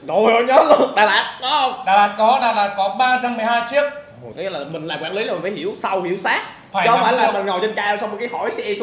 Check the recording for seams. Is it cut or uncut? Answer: cut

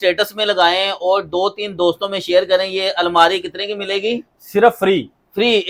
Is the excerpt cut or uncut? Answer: uncut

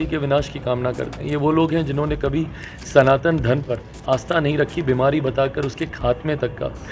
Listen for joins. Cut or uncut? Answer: uncut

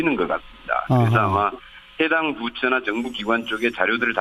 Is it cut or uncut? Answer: uncut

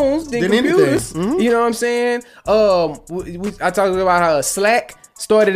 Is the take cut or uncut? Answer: uncut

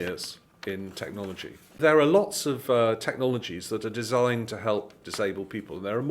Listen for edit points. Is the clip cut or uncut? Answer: cut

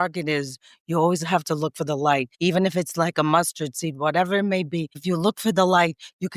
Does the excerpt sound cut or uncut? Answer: cut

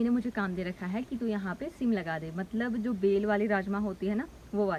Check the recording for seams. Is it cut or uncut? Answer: uncut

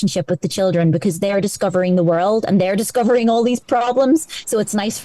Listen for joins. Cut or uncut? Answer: uncut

